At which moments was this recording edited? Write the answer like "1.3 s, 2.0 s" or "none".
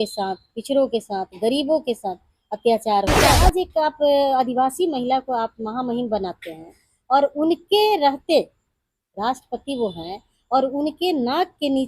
3.2 s